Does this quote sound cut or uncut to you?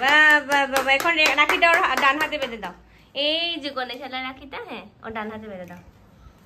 uncut